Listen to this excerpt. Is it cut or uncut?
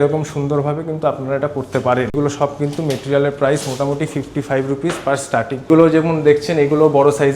cut